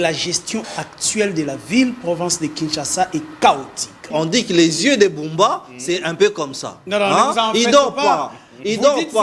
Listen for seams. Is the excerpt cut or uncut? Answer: cut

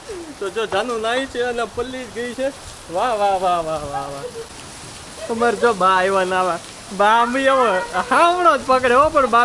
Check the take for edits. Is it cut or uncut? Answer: cut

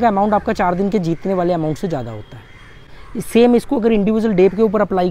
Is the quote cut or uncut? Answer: uncut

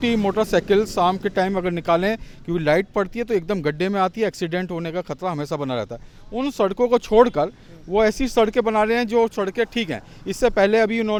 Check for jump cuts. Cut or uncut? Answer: uncut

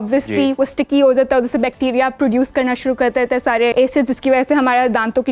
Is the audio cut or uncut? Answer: cut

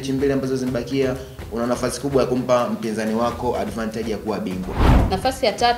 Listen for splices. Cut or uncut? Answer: cut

